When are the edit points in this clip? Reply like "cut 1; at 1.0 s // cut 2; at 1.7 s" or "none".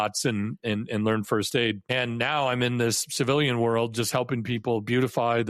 cut 1; at 1.8 s